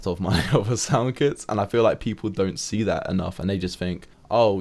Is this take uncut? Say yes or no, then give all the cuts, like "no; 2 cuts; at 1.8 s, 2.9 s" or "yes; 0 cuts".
yes; 0 cuts